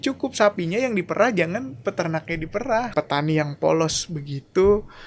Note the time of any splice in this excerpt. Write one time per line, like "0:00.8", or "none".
0:02.9

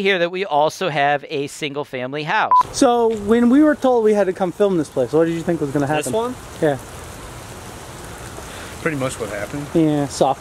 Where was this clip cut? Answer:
0:02.5

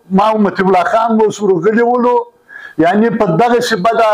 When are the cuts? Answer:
none

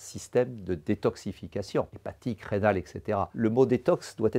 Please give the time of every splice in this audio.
0:02.0
0:03.3

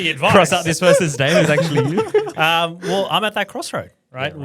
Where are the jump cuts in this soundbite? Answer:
none

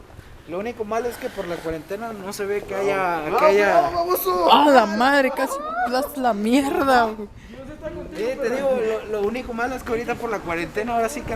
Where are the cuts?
none

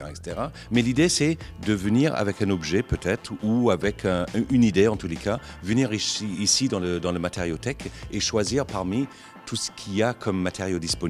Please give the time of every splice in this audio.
none

